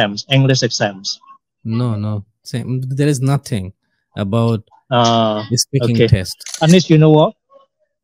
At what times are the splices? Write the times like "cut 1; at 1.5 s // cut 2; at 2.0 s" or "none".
cut 1; at 2.4 s // cut 2; at 6.5 s